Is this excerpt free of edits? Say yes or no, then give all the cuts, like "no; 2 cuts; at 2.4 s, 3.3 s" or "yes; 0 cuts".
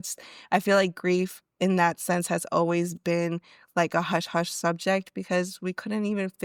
yes; 0 cuts